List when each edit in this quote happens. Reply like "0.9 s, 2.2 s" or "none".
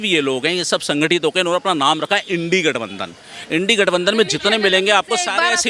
none